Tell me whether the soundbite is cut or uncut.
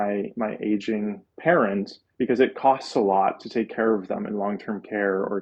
cut